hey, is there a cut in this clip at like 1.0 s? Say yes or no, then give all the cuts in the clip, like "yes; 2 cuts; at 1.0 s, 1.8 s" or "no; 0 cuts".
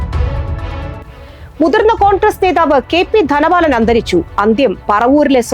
yes; 1 cut; at 1.0 s